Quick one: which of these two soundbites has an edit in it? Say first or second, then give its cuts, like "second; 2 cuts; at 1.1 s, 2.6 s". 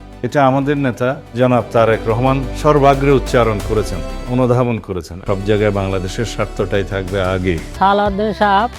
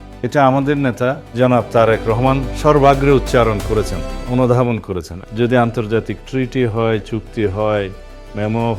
first; 2 cuts; at 5.2 s, 7.7 s